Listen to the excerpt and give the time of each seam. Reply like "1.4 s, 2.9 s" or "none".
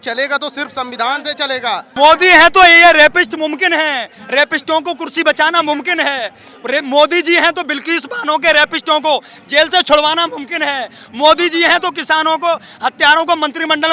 1.9 s